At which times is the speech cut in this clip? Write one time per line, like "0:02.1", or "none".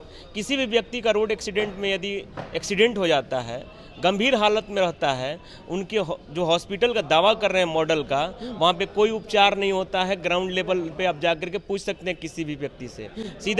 none